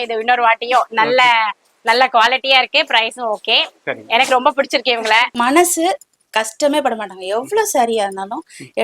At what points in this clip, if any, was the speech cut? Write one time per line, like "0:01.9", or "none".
0:05.3